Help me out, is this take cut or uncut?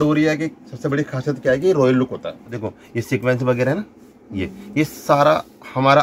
cut